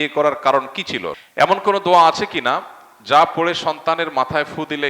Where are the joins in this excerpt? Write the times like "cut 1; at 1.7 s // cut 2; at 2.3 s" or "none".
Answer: cut 1; at 1.1 s